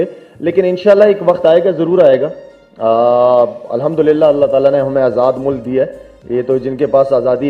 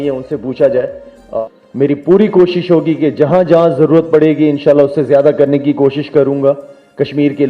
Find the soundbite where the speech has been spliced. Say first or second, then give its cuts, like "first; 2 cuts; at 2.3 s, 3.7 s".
second; 1 cut; at 1.3 s